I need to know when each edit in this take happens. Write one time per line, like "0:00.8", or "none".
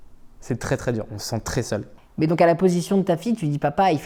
0:01.9